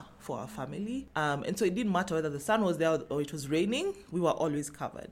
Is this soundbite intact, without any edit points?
yes; 0 cuts

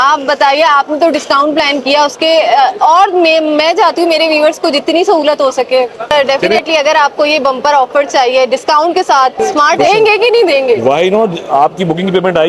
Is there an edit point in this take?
yes; 2 cuts; at 6.1 s, 9.8 s

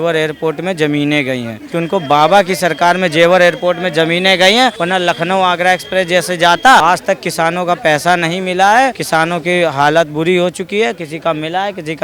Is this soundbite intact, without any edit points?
no; 4 cuts; at 1.6 s, 4.8 s, 6.8 s, 9.0 s

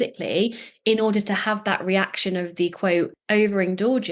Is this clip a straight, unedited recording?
no; 1 cut; at 3.2 s

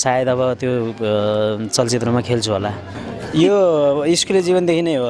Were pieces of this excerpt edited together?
yes; 1 cut; at 2.9 s

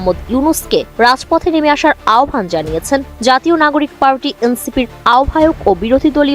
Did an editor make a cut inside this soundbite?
no; 0 cuts

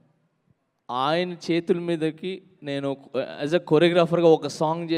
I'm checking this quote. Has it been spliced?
no; 0 cuts

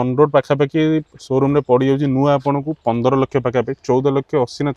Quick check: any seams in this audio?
no; 0 cuts

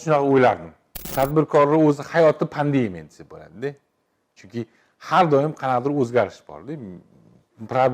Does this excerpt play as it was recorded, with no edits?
no; 1 cut; at 1.1 s

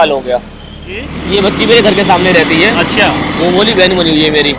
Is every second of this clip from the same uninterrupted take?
no; 1 cut; at 1.1 s

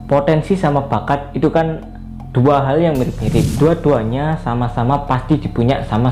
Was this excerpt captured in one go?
no; 1 cut; at 3.5 s

